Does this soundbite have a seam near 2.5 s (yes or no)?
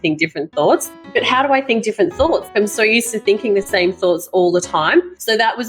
yes